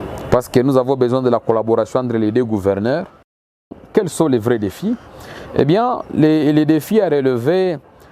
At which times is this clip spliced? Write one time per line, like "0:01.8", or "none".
0:03.7